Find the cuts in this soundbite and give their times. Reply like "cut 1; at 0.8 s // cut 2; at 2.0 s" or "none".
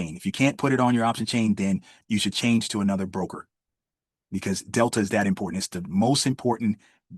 cut 1; at 2.0 s